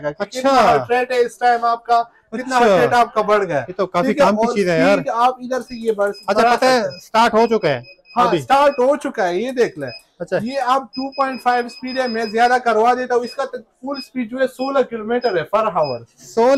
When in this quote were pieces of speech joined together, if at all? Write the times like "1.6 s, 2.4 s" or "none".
none